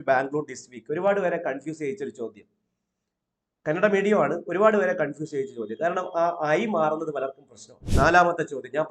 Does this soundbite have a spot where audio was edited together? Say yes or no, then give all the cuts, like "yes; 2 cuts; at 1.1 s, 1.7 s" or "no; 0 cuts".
yes; 1 cut; at 7.8 s